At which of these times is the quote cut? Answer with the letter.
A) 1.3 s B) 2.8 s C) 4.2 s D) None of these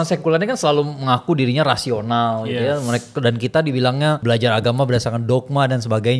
C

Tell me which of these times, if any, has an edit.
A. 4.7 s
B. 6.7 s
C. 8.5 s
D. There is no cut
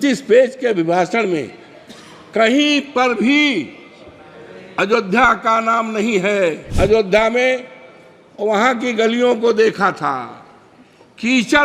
B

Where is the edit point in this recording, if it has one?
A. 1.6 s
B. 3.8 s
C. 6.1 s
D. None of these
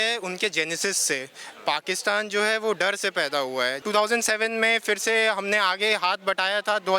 B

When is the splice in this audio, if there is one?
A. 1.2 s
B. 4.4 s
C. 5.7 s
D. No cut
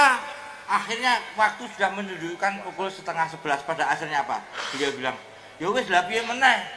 D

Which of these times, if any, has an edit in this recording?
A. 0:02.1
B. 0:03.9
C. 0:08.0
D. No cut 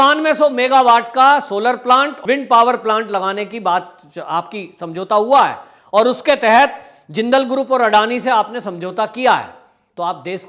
A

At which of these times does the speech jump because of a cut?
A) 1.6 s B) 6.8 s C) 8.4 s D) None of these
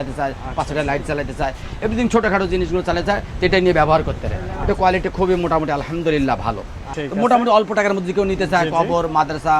B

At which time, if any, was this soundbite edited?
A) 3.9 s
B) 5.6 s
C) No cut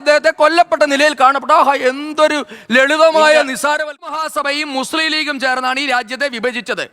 A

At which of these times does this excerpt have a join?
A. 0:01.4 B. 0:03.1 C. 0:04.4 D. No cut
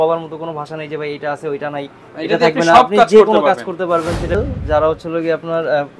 C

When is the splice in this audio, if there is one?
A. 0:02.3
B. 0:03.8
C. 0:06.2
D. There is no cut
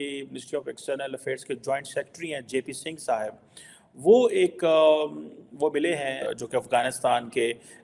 C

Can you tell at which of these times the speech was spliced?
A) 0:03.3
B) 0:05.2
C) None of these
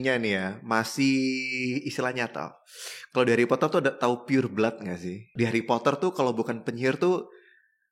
B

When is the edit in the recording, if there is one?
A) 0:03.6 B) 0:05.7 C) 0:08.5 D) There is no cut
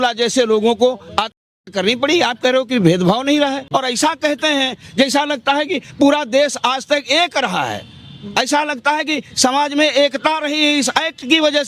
A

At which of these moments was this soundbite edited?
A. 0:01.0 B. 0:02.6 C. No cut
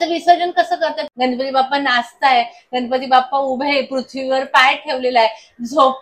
A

